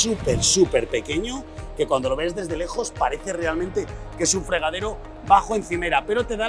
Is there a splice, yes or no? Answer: no